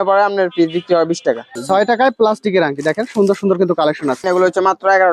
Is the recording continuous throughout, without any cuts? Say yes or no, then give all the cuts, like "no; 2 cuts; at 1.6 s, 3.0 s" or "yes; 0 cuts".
no; 2 cuts; at 1.5 s, 4.2 s